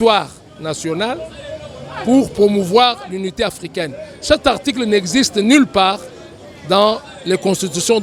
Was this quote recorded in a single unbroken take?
yes; 0 cuts

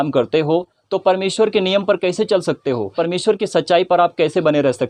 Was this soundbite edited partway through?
no; 0 cuts

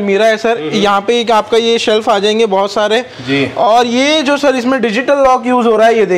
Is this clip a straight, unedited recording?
yes; 0 cuts

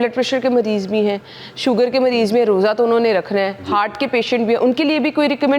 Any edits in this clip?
no; 0 cuts

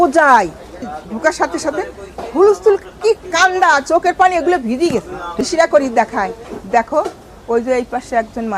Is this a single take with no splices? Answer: no; 2 cuts; at 0.9 s, 5.3 s

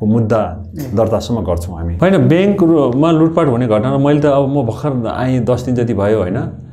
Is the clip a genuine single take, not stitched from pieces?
no; 1 cut; at 1.8 s

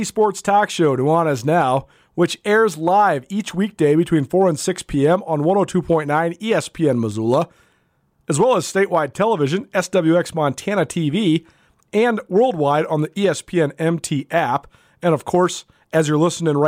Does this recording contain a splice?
no; 0 cuts

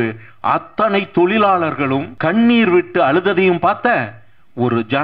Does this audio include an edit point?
yes; 1 cut; at 2.1 s

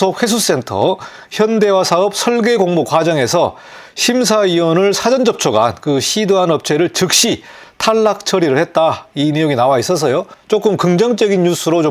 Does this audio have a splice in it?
no; 0 cuts

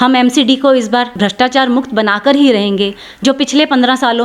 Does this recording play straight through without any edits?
no; 1 cut; at 1.1 s

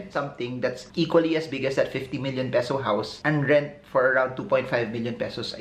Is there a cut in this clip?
no; 0 cuts

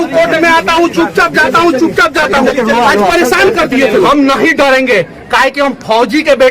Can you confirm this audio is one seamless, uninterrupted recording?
no; 1 cut; at 4.1 s

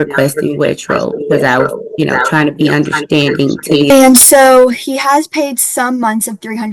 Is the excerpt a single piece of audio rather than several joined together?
no; 1 cut; at 3.9 s

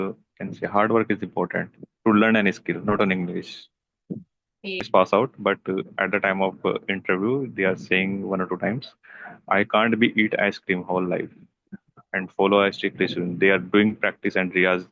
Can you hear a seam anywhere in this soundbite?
yes; 1 cut; at 4.9 s

